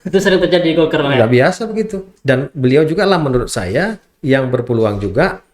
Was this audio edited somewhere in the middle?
yes; 1 cut; at 2.1 s

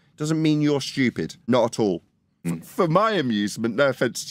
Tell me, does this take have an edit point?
yes; 2 cuts; at 1.4 s, 2.5 s

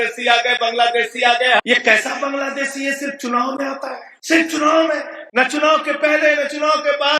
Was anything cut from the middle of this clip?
yes; 3 cuts; at 1.6 s, 4.1 s, 5.2 s

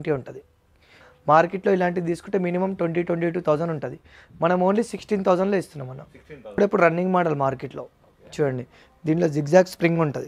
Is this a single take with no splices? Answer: no; 2 cuts; at 1.0 s, 6.6 s

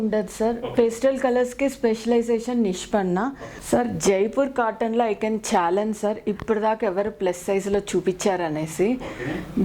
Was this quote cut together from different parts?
yes; 1 cut; at 3.5 s

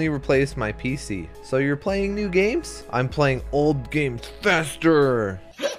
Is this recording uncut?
yes; 0 cuts

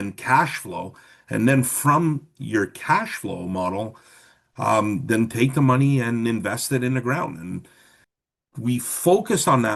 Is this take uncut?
yes; 0 cuts

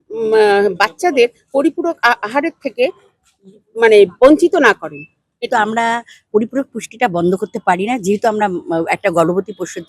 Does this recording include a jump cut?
yes; 1 cut; at 5.5 s

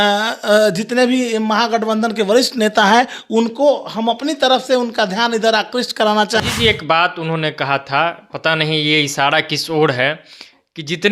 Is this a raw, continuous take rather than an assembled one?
no; 1 cut; at 6.4 s

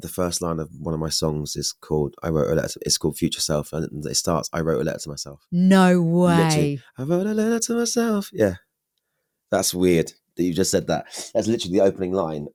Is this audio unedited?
yes; 0 cuts

